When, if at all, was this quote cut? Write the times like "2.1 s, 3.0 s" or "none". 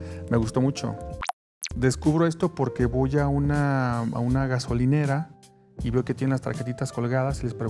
1.3 s